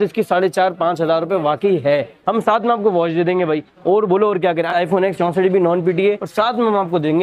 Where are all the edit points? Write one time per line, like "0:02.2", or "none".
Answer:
0:02.2
0:04.7
0:06.2